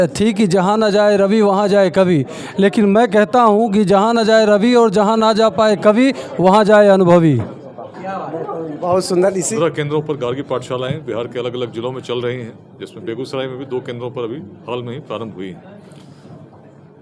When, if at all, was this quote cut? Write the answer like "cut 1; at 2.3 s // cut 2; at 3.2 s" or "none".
cut 1; at 9.4 s

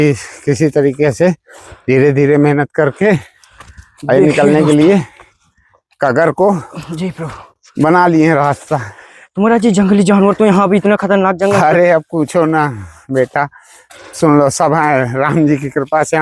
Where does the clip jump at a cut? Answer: none

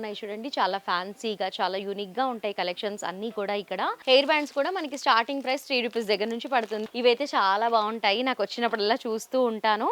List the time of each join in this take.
cut 1; at 4.0 s // cut 2; at 6.8 s

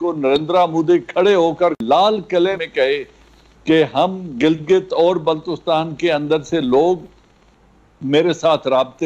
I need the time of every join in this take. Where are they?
cut 1; at 1.8 s // cut 2; at 2.6 s

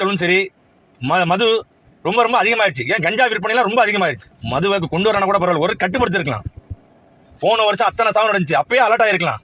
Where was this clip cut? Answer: cut 1; at 4.3 s

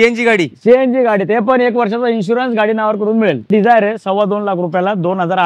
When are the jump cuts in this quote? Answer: cut 1; at 3.5 s

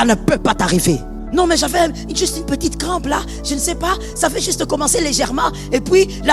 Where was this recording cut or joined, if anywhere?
cut 1; at 1.1 s

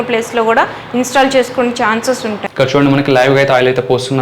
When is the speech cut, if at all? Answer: cut 1; at 2.5 s

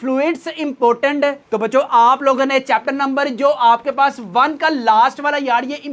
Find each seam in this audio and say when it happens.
cut 1; at 1.4 s

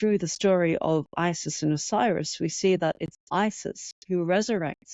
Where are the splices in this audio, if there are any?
none

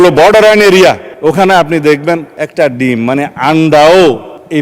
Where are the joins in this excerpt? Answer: cut 1; at 1.1 s

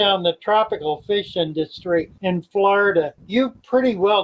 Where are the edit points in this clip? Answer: cut 1; at 2.1 s // cut 2; at 3.2 s

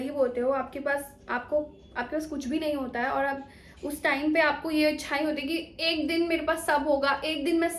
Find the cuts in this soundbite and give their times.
none

